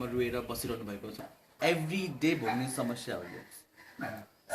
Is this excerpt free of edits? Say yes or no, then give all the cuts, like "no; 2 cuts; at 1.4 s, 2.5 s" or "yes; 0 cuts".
no; 1 cut; at 1.3 s